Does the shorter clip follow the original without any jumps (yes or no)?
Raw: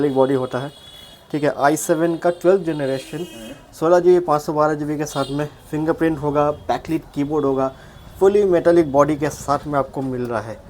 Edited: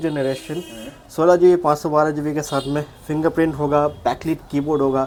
yes